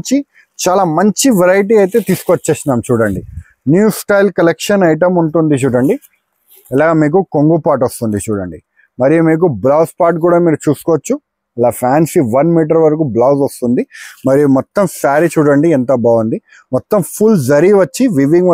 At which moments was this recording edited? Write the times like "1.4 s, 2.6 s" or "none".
none